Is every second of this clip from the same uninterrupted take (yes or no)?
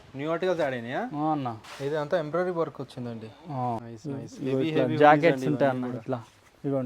no